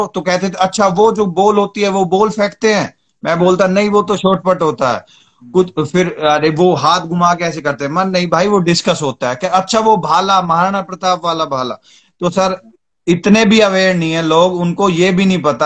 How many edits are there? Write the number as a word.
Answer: zero